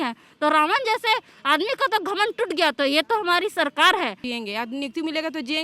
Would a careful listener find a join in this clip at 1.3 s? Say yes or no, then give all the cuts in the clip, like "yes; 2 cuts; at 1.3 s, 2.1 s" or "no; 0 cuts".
no; 1 cut; at 4.2 s